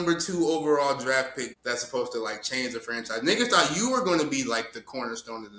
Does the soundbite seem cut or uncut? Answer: cut